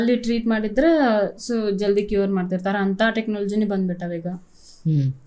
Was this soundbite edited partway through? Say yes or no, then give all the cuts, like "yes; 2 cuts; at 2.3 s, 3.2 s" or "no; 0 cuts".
no; 0 cuts